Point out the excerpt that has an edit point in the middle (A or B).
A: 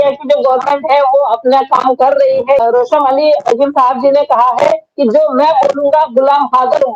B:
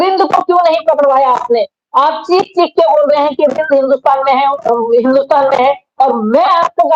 A